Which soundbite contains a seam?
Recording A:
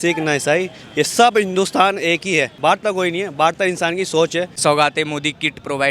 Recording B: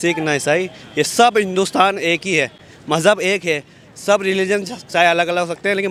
A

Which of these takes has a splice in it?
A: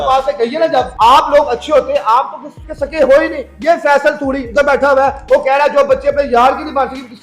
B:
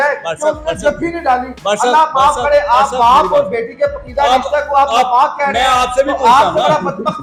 A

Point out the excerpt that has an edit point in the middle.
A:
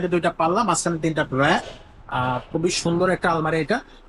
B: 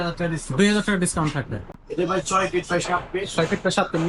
B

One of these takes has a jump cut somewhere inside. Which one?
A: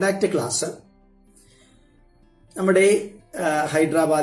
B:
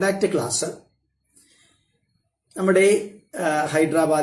A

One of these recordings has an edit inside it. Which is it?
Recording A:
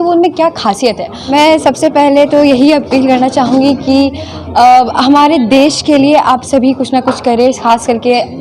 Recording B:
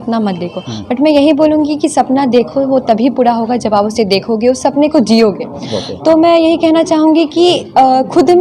A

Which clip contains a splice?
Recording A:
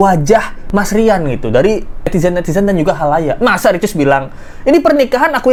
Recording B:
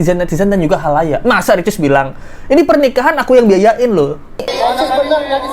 B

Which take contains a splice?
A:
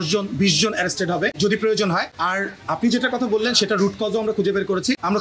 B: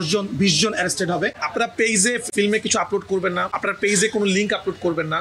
B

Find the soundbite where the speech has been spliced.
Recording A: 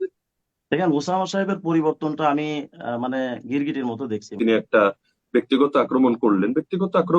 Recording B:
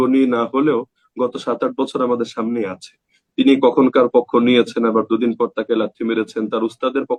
A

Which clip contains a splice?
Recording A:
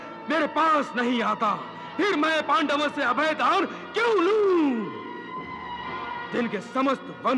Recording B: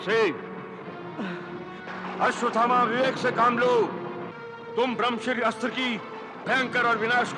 A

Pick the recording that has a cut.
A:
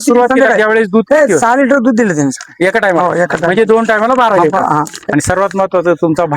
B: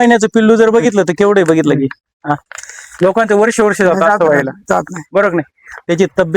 A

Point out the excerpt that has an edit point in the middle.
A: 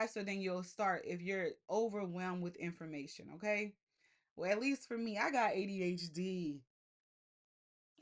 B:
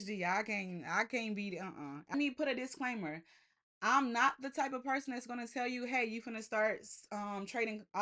B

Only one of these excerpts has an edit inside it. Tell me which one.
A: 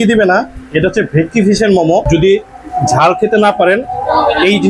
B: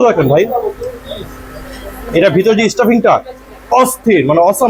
A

